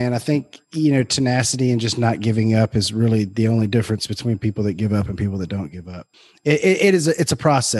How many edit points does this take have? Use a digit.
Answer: 1